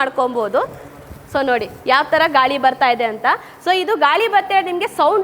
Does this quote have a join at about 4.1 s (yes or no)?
no